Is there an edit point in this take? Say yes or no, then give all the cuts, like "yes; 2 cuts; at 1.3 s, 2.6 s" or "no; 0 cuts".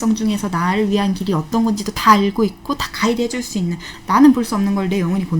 yes; 1 cut; at 3.9 s